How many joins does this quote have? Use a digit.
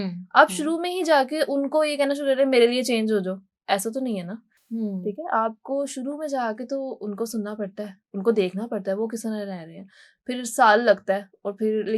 0